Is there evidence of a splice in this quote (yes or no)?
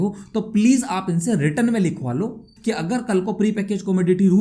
yes